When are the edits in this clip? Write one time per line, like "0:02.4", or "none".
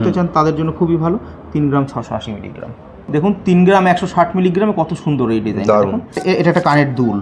0:03.1
0:06.2